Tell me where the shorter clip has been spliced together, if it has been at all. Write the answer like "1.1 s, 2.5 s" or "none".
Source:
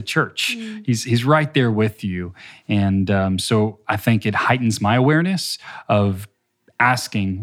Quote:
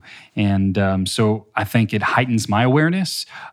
none